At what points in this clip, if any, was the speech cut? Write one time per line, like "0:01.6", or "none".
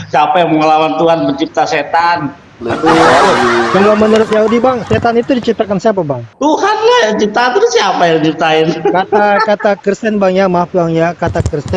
0:06.2